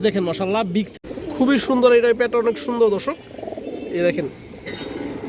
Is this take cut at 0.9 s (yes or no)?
yes